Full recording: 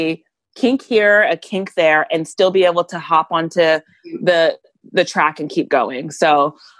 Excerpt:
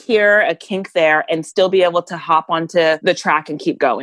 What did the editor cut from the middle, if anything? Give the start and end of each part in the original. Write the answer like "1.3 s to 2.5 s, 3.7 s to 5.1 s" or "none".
3.8 s to 4.9 s